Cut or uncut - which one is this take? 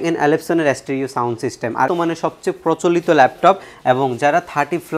cut